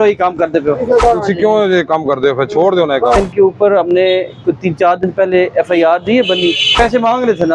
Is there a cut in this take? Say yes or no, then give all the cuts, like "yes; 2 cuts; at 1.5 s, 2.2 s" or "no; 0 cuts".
yes; 3 cuts; at 1.0 s, 3.2 s, 6.7 s